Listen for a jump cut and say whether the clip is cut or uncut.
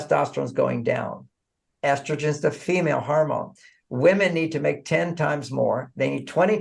uncut